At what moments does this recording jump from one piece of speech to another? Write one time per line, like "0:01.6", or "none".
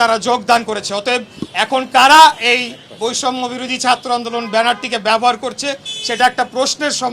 none